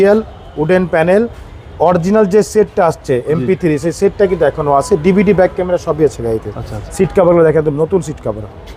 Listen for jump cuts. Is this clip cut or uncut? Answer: uncut